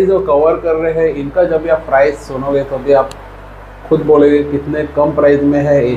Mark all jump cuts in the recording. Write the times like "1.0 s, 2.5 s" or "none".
none